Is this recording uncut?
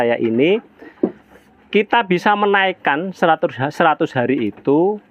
yes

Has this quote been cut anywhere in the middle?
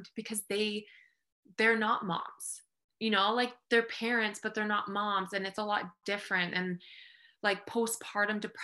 no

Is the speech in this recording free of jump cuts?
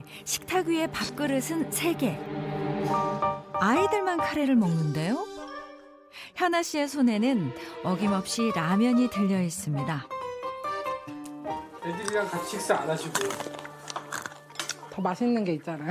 yes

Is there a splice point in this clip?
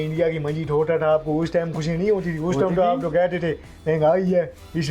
no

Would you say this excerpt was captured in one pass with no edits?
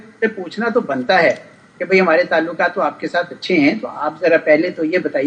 yes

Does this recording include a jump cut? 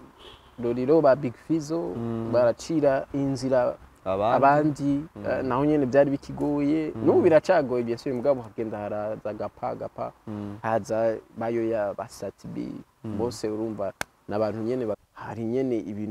yes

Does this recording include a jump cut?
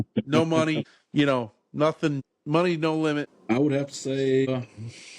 yes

